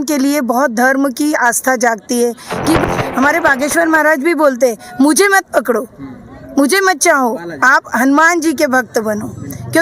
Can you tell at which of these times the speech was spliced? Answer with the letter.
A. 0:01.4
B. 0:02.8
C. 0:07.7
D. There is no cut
B